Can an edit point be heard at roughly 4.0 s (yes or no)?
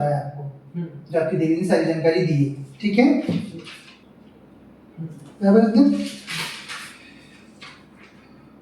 yes